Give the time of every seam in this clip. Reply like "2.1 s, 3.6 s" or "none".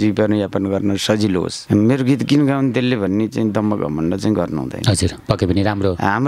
1.6 s